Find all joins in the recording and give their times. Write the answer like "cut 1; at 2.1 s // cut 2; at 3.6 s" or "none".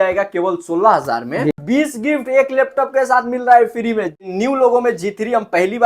cut 1; at 1.5 s // cut 2; at 4.3 s